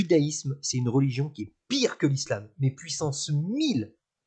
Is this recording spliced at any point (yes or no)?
no